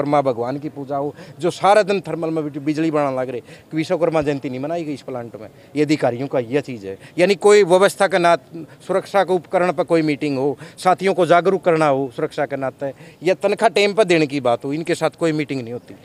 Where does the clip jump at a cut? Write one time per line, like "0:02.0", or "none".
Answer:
none